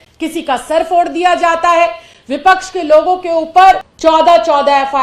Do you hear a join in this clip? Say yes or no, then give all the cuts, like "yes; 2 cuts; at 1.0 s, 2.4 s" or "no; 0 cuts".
yes; 1 cut; at 3.9 s